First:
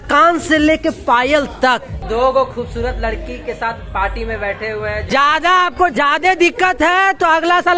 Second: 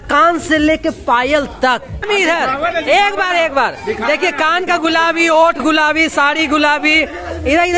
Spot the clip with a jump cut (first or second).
first